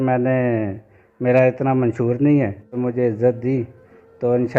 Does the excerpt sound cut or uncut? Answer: cut